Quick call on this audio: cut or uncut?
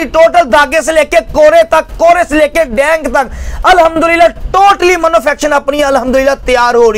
uncut